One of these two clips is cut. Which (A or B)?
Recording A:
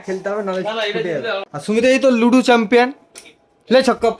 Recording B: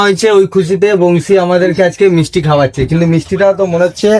A